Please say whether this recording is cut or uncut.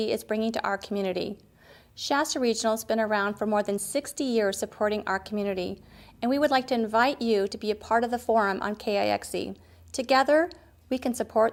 uncut